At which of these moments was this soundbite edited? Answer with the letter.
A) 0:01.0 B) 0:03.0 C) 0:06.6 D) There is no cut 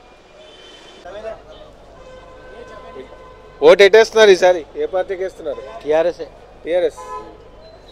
A